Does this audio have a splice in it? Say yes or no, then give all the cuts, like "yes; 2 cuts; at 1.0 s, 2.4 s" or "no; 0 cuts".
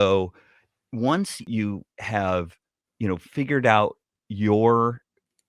yes; 1 cut; at 1.4 s